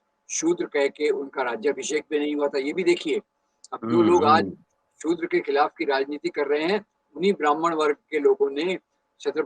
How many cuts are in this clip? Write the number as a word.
zero